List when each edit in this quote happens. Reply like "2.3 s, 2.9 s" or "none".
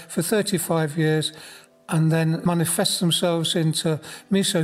2.4 s